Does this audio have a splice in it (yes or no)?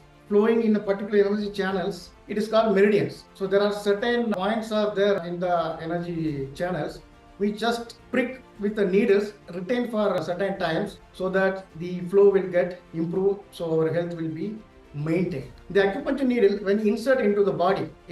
yes